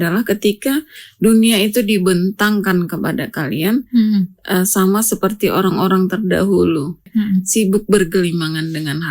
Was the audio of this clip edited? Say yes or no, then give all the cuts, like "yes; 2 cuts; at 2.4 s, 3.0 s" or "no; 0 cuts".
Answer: yes; 1 cut; at 7.1 s